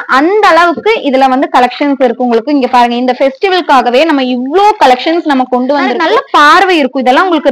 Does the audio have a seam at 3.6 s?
no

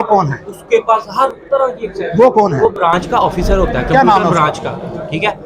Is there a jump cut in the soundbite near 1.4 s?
no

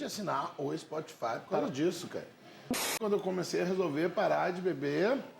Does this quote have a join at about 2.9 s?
yes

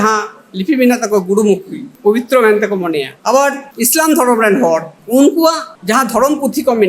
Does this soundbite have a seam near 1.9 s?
yes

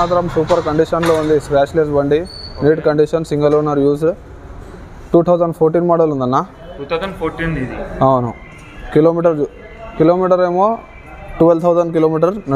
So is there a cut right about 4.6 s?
no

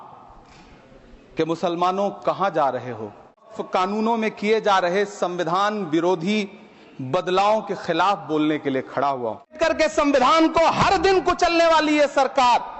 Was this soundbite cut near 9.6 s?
yes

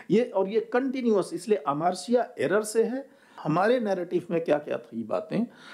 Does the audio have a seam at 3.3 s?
yes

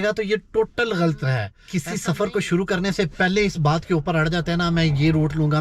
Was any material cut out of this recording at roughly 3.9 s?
no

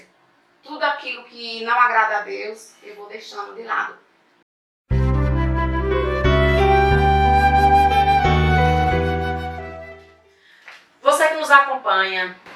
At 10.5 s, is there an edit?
no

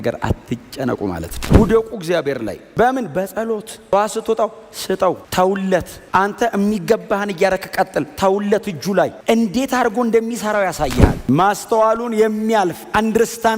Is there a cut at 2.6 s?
no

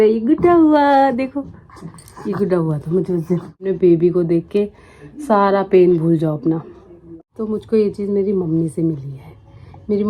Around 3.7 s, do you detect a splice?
yes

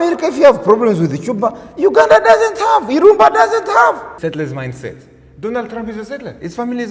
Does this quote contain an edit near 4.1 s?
yes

